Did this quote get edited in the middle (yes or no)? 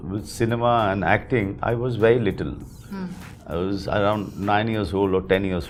no